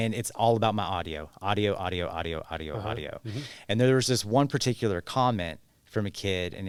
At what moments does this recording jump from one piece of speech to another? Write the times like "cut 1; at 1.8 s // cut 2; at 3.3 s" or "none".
none